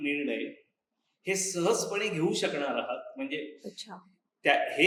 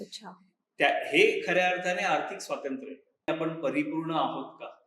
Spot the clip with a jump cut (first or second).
second